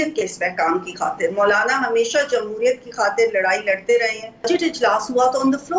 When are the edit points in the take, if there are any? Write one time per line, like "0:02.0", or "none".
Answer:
0:04.5